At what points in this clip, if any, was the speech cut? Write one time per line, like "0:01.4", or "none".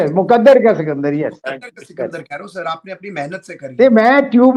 none